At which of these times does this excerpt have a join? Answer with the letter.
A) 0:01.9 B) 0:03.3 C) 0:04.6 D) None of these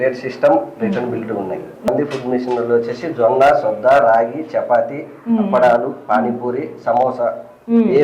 A